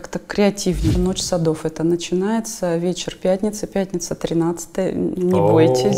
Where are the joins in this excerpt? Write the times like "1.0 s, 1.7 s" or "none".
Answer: 0.9 s